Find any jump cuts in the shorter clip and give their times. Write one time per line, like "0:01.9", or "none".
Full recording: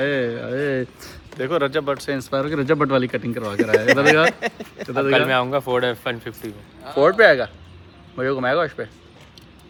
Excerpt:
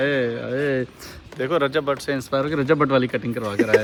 none

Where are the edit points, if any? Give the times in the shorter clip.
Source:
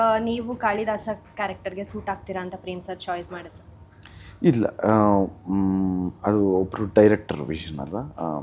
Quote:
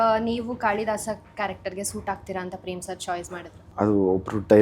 0:03.7

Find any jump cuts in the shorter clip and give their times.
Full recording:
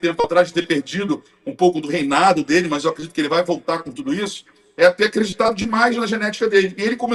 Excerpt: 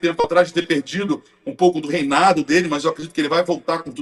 none

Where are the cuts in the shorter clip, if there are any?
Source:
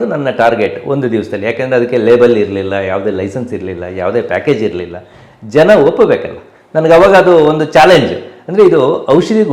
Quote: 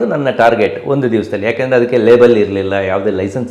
none

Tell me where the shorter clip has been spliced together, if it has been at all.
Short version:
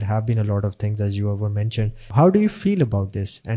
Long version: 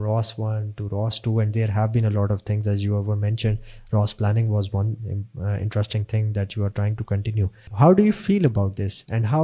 0:02.0

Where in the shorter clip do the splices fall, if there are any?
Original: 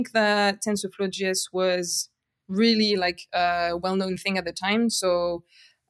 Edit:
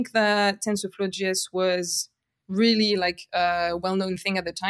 none

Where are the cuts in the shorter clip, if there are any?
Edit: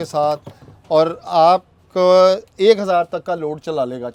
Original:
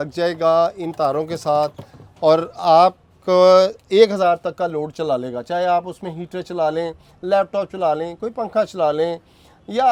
none

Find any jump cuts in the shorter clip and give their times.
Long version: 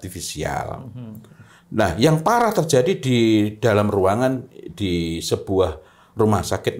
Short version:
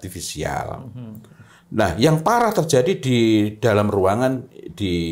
none

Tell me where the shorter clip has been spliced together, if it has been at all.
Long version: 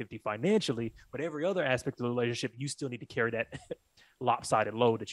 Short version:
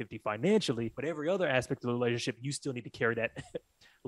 0:00.9

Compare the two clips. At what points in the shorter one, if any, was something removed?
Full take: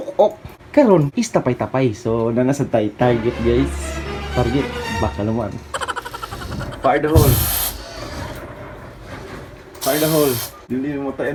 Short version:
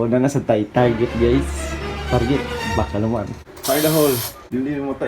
0:03.4

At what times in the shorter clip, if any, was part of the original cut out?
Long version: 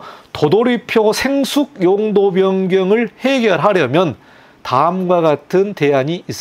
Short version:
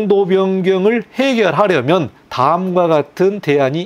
0:02.2

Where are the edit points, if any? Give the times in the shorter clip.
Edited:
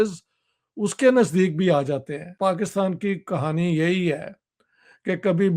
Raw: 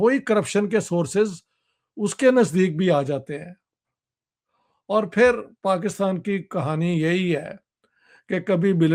0:02.3

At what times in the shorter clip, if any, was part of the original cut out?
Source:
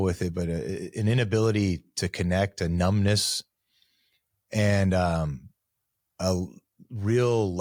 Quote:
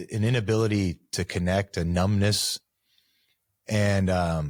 none

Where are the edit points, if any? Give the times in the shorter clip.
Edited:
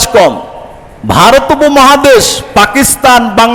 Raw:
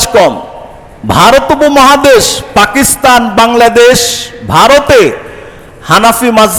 none

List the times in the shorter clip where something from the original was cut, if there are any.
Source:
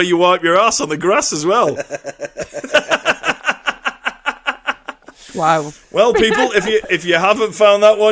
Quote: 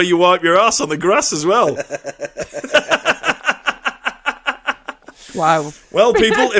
none

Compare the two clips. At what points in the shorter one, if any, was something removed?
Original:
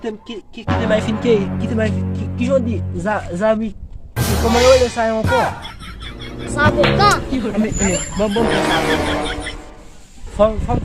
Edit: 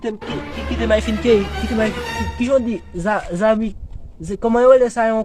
none

